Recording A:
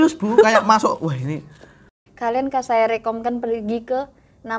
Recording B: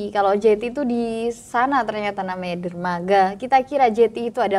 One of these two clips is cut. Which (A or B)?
A